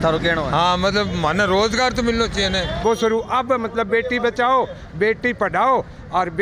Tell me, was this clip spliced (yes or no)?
yes